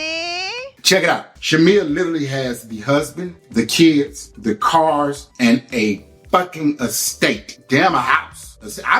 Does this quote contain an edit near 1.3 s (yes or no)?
yes